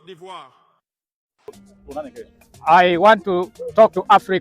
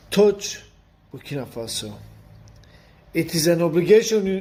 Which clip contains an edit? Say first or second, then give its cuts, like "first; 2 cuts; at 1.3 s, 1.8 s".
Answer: first; 1 cut; at 1.5 s